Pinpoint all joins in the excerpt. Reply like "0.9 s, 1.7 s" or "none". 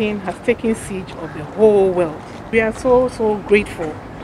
2.5 s